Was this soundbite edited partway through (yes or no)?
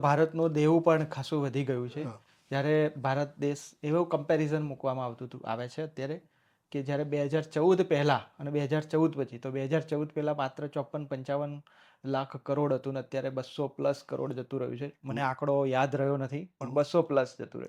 no